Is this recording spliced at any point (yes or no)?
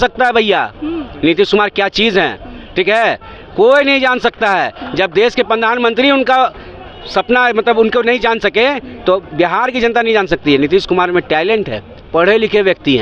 no